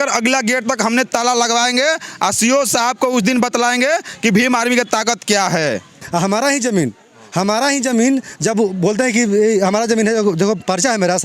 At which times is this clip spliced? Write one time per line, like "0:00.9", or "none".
0:06.0